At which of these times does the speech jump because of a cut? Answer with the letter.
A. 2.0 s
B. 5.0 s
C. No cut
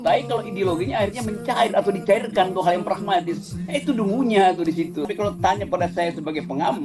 B